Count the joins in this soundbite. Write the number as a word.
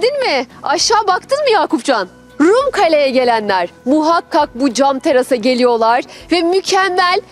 one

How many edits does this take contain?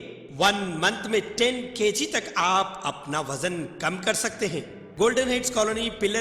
one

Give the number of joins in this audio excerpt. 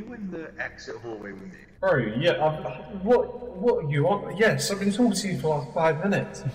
zero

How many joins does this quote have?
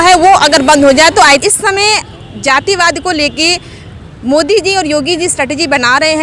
one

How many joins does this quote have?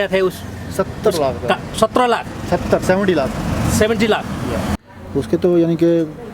one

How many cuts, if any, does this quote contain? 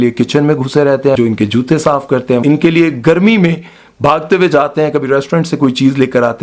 two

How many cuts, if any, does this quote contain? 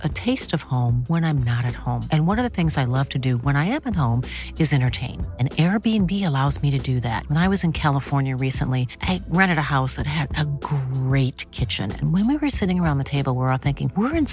zero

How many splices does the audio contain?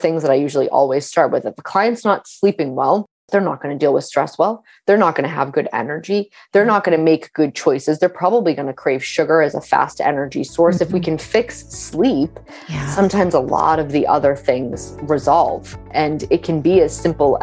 two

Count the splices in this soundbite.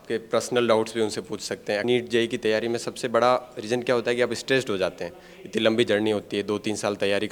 one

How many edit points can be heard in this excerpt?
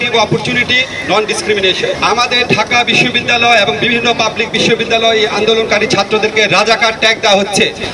one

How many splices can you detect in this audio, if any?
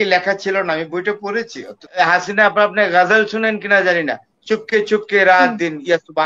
one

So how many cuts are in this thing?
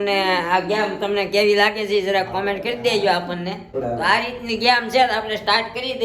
one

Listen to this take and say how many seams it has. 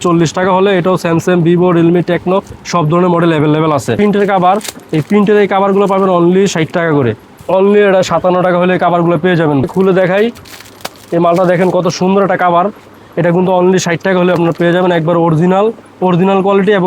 two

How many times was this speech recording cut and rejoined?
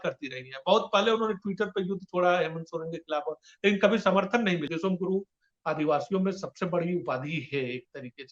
one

